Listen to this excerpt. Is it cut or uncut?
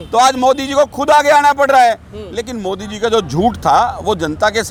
uncut